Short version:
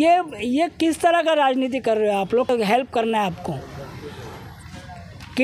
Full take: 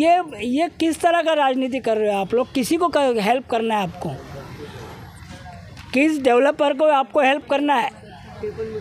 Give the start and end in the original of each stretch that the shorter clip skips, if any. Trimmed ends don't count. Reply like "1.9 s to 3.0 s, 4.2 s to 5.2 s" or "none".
2.5 s to 3.1 s